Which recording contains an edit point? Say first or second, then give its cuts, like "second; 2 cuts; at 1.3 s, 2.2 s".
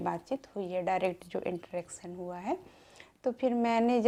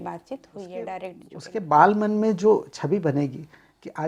second; 1 cut; at 1.3 s